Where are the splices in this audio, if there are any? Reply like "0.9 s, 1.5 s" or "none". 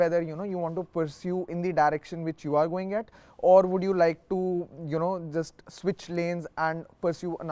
none